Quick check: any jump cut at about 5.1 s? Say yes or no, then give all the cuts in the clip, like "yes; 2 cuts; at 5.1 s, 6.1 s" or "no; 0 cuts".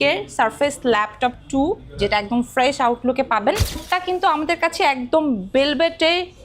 no; 1 cut; at 3.8 s